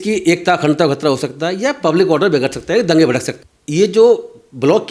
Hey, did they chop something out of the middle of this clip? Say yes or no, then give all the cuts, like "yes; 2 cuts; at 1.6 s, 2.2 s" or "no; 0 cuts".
yes; 1 cut; at 3.3 s